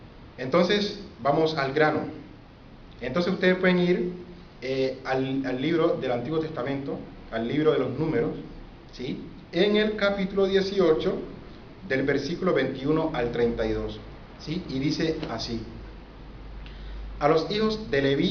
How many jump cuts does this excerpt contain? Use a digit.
1